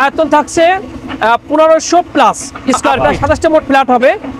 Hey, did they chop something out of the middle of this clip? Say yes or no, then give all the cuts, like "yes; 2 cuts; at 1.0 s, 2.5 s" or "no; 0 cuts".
yes; 1 cut; at 2.9 s